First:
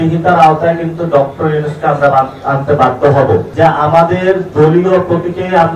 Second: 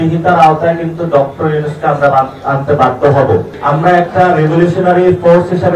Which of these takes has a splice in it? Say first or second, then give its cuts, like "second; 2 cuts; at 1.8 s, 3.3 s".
second; 1 cut; at 3.5 s